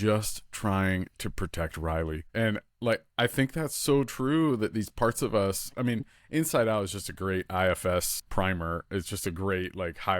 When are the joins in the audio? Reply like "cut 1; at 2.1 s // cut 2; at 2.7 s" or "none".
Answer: cut 1; at 2.2 s // cut 2; at 8.2 s